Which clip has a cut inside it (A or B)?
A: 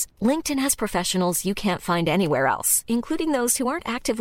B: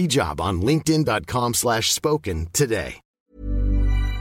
B